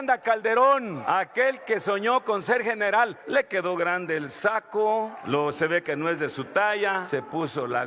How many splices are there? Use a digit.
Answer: 4